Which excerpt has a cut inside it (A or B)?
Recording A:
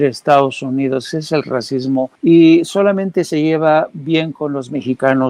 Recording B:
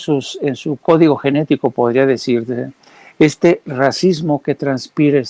A